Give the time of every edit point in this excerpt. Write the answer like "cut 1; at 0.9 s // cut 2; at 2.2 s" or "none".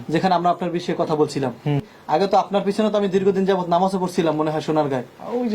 cut 1; at 1.9 s

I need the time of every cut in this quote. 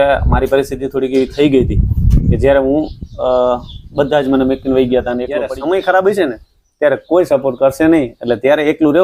cut 1; at 5.4 s

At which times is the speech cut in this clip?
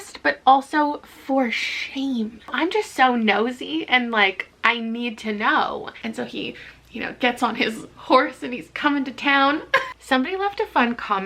cut 1; at 2.5 s // cut 2; at 5.9 s // cut 3; at 9.9 s

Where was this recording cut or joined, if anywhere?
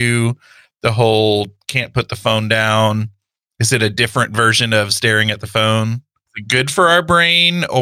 cut 1; at 6.3 s

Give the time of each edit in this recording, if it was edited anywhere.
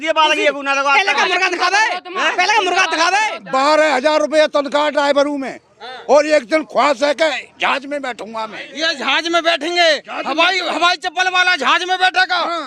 cut 1; at 3.4 s // cut 2; at 8.6 s

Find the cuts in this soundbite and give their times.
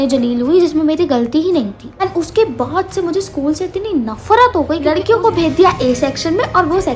cut 1; at 2.0 s // cut 2; at 4.9 s

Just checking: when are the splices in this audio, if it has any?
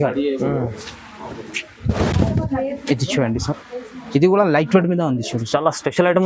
none

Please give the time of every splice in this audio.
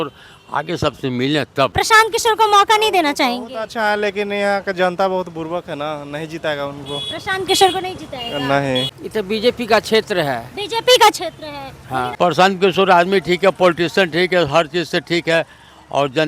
cut 1; at 1.7 s // cut 2; at 8.9 s // cut 3; at 12.1 s

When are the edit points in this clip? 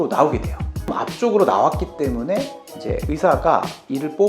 cut 1; at 0.9 s

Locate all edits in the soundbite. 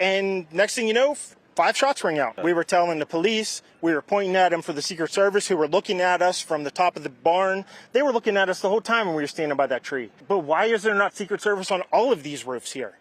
cut 1; at 2.3 s // cut 2; at 10.1 s

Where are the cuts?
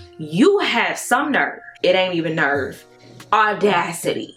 none

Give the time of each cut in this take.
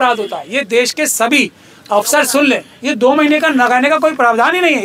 cut 1; at 2.7 s

